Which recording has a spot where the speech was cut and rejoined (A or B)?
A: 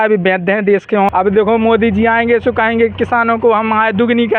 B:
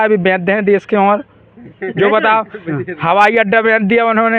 A